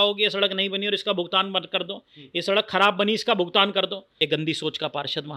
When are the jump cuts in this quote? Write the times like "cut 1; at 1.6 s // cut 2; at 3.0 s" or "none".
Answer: cut 1; at 4.0 s